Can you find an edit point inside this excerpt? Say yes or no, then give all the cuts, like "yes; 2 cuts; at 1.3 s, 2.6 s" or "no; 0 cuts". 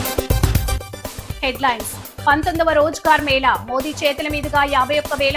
yes; 1 cut; at 1.2 s